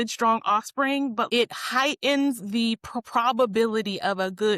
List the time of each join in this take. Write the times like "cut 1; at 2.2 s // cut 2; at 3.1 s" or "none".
cut 1; at 1.3 s